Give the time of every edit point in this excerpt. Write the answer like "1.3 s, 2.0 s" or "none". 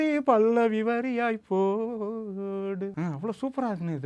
2.9 s